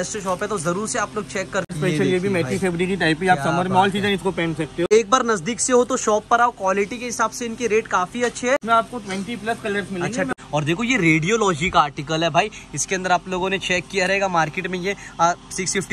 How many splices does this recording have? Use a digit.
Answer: 4